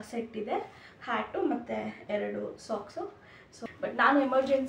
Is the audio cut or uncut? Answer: cut